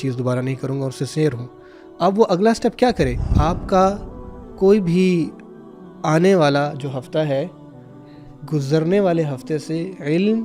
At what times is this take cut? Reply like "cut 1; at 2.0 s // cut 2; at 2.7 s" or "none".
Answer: cut 1; at 3.2 s